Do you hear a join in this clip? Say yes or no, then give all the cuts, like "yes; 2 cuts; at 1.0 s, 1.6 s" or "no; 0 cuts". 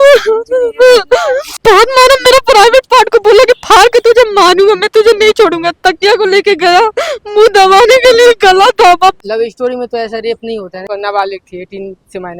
yes; 3 cuts; at 1.4 s, 9.2 s, 10.8 s